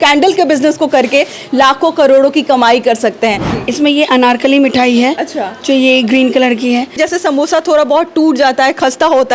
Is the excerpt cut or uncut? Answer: cut